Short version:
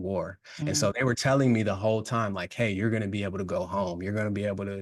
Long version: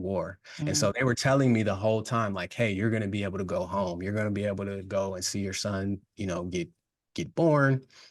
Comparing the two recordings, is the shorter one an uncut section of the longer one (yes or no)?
yes